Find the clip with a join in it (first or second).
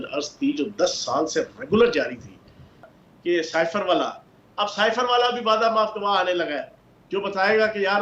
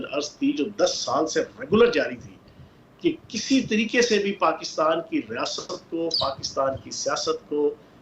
first